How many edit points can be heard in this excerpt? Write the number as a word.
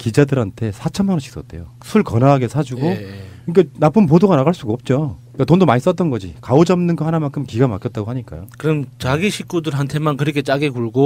zero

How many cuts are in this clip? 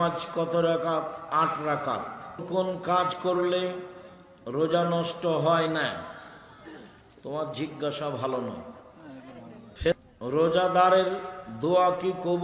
two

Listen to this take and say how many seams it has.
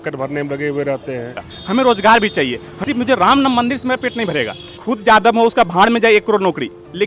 three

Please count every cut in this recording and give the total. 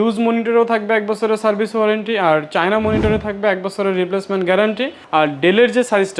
one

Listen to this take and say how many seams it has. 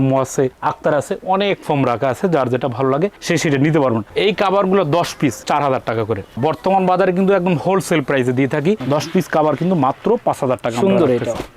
two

